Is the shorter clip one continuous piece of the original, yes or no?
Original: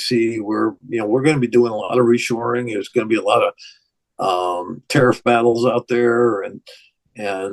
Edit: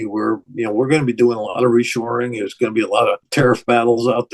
no